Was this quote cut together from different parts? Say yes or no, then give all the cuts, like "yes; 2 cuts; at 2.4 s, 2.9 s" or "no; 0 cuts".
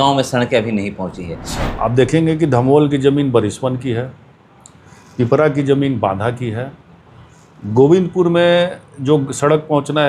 yes; 1 cut; at 1.5 s